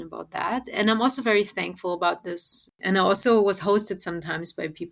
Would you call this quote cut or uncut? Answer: cut